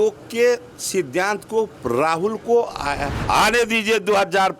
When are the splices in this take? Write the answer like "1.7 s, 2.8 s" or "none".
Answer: 3.1 s